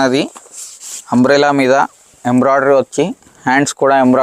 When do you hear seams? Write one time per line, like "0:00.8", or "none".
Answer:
none